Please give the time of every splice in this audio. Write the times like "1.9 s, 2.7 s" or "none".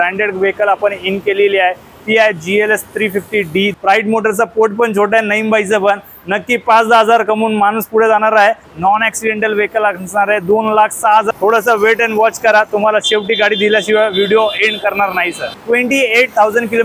3.7 s, 8.7 s, 11.3 s, 15.5 s